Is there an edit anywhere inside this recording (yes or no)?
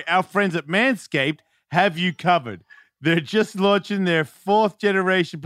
no